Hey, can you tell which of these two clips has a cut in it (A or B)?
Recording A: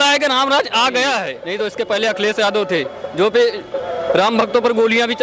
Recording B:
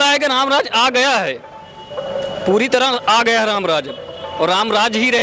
A